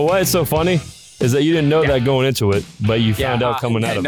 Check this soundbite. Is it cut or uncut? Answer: cut